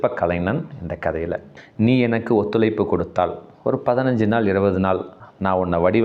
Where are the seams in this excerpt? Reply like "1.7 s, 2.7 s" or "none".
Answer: 1.6 s